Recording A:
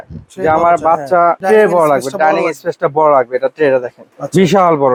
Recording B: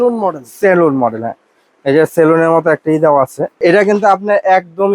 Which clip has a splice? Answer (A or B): B